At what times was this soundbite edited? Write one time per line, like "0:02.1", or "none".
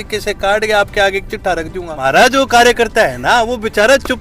0:01.9